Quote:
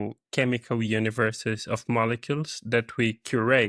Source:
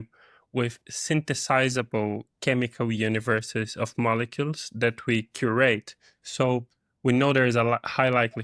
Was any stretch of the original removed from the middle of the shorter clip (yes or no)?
no